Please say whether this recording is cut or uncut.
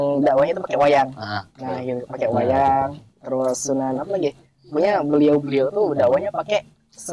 uncut